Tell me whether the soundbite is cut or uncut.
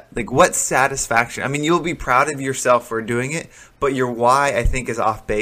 uncut